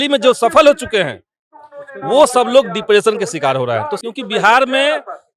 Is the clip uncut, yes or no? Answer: no